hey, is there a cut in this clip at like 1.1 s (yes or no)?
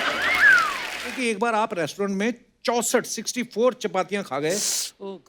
yes